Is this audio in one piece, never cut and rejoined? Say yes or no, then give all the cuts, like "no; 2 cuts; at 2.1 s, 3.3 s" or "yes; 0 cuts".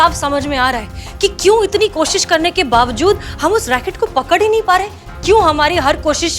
yes; 0 cuts